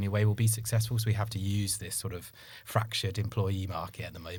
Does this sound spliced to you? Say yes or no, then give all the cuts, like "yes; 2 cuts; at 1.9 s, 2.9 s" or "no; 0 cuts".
no; 0 cuts